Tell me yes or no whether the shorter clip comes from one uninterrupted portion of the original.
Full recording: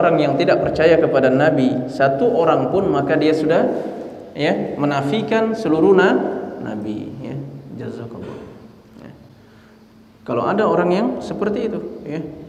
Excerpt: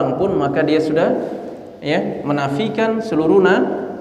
yes